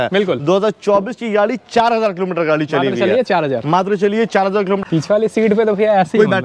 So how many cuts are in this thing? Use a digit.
1